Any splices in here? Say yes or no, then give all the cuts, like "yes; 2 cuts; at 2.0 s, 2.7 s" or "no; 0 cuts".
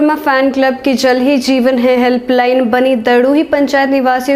no; 0 cuts